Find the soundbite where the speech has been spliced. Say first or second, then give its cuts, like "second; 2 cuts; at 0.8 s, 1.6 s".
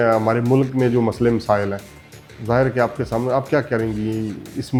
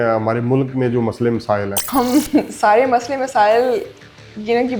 second; 1 cut; at 1.8 s